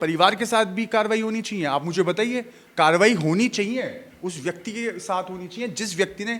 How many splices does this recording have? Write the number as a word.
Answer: zero